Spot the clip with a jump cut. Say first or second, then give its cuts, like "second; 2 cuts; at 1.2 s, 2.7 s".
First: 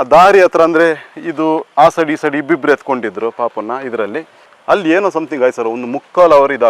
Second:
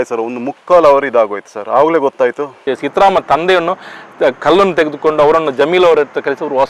second; 1 cut; at 2.6 s